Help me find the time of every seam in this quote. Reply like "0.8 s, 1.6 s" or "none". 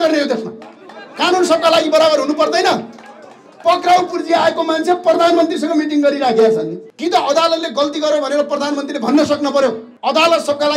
6.8 s, 9.9 s